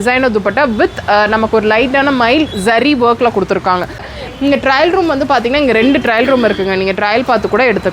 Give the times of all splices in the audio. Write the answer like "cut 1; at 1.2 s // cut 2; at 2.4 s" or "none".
cut 1; at 4.1 s